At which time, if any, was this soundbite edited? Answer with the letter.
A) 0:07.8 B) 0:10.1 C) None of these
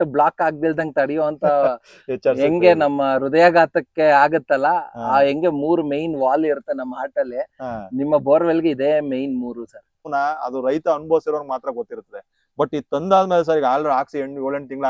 B